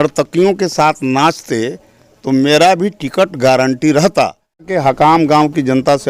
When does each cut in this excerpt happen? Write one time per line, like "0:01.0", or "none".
0:04.7